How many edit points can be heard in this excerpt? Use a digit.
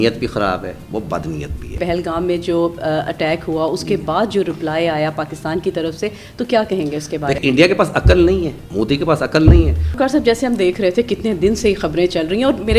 4